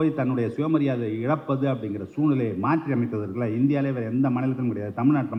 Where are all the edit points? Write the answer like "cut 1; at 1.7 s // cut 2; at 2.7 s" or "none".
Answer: none